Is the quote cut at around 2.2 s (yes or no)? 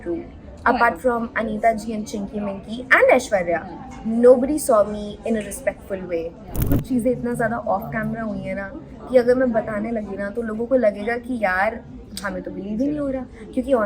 no